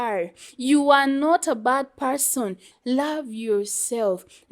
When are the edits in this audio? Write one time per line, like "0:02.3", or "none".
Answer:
0:02.7